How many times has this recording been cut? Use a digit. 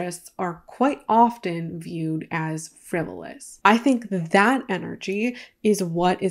1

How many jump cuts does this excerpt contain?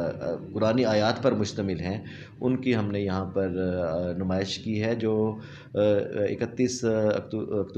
1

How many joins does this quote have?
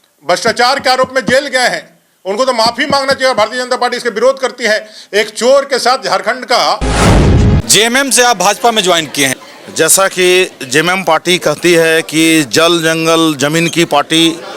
2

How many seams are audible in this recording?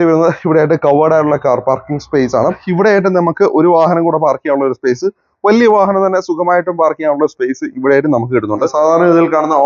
2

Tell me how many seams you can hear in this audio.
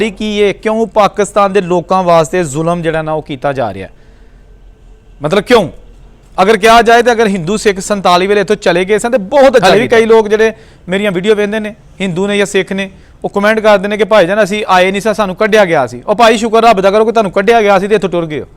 1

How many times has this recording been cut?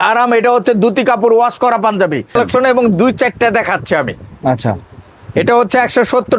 1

